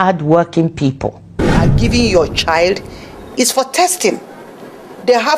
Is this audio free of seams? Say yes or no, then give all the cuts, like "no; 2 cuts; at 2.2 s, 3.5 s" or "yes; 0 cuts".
no; 1 cut; at 1.6 s